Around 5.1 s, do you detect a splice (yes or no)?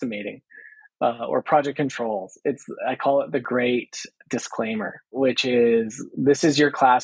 yes